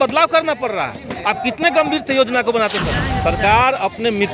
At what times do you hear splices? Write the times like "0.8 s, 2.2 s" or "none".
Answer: 3.0 s